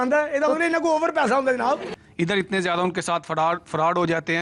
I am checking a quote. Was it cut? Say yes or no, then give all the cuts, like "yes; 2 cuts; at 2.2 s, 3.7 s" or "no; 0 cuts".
yes; 1 cut; at 1.9 s